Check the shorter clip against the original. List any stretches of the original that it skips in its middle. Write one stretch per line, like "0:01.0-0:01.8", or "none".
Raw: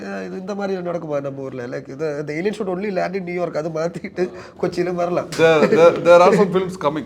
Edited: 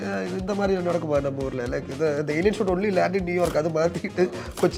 none